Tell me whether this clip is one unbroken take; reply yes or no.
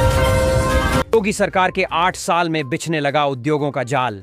yes